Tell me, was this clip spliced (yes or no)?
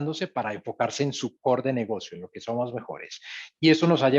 no